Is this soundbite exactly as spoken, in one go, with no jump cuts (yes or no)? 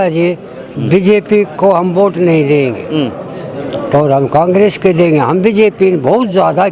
yes